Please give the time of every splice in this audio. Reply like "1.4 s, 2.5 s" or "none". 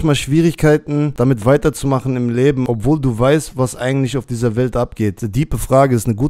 1.1 s, 2.7 s, 5.2 s